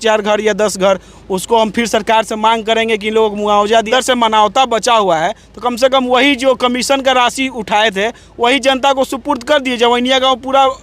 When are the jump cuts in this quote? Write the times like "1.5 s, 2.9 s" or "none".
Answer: 3.9 s

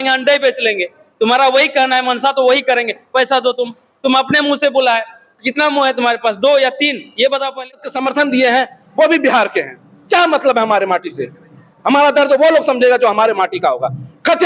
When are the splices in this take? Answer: 7.9 s

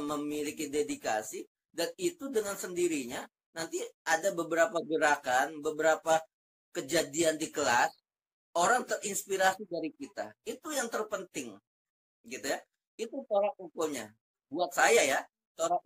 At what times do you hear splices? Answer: none

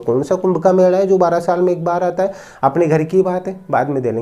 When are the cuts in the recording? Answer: none

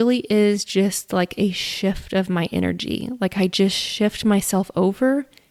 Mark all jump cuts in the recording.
none

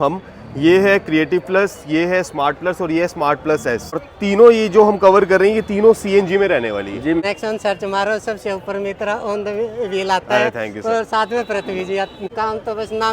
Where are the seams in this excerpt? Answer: 4.0 s, 7.2 s, 12.3 s

